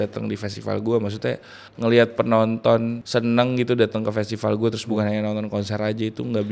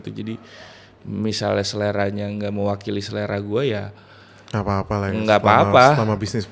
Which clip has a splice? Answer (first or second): first